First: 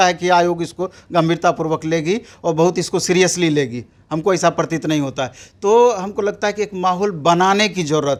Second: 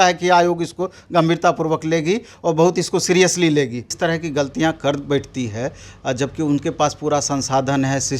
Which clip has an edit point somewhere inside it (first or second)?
second